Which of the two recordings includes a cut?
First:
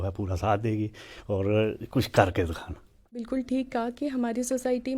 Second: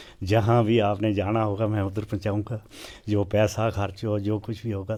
first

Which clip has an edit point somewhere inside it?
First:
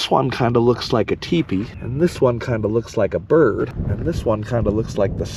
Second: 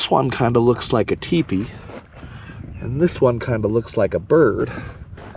first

